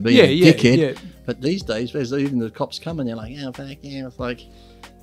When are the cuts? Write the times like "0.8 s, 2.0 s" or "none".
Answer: none